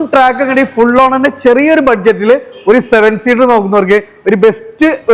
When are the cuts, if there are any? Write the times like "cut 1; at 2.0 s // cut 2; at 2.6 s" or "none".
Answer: none